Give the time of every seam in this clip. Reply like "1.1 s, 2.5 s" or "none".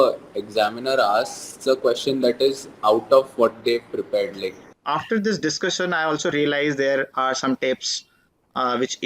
4.7 s